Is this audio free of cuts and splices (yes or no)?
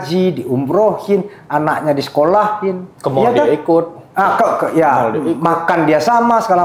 yes